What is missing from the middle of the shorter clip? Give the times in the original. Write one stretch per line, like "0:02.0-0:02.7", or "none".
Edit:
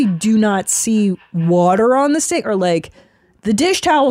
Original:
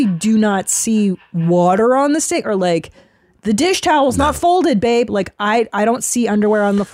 none